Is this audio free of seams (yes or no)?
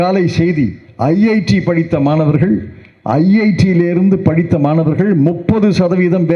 yes